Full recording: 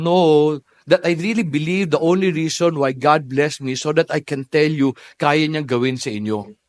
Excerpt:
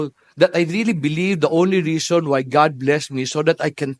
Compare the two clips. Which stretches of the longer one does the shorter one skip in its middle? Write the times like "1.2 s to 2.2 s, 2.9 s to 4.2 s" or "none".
none

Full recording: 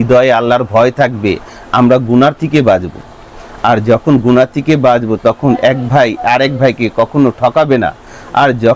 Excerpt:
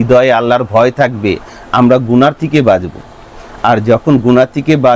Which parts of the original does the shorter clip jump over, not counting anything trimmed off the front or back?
none

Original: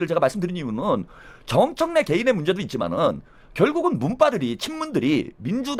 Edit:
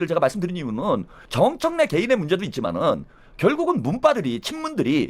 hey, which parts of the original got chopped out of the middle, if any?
1.2 s to 1.3 s

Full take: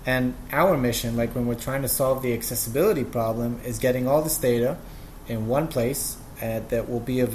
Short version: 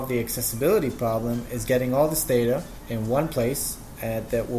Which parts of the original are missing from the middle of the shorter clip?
4.9 s to 5.2 s

